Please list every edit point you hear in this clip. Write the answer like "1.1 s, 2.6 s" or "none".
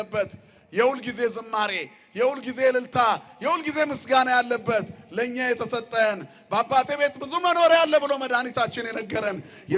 none